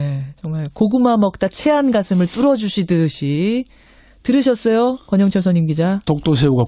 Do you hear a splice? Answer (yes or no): no